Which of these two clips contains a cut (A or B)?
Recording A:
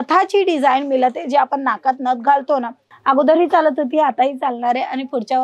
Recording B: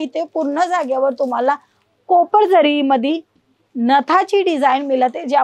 A